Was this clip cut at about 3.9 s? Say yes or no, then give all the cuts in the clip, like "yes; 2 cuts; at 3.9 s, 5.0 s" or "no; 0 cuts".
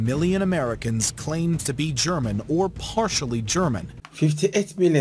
yes; 1 cut; at 3.9 s